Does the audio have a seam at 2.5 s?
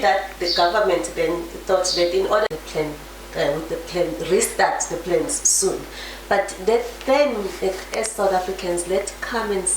yes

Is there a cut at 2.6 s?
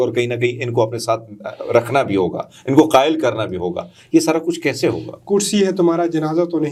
no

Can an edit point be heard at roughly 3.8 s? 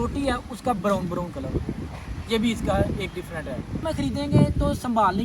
yes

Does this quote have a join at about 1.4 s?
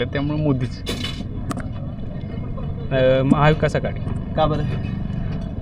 no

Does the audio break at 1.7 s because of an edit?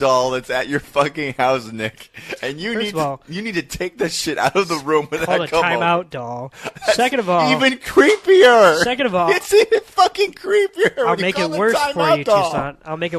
no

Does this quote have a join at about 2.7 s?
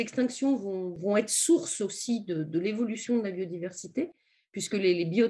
no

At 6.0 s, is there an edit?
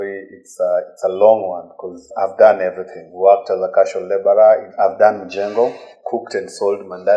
yes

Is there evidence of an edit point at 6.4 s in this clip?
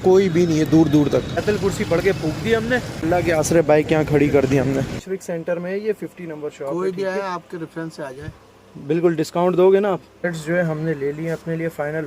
no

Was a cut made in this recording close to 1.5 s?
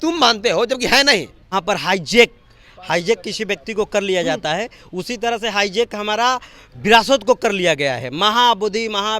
yes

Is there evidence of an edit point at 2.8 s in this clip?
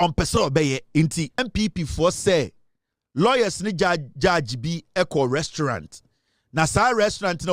no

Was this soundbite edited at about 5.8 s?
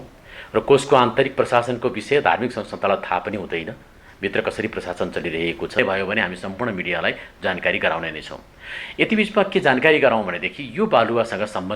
yes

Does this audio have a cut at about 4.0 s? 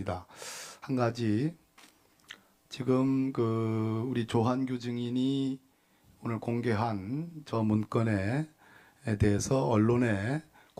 no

